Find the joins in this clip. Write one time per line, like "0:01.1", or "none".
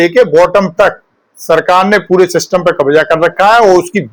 none